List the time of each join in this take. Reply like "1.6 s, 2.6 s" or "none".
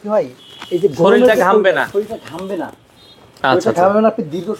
none